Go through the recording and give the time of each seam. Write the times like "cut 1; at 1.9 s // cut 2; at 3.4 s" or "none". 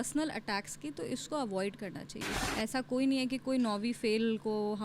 cut 1; at 2.3 s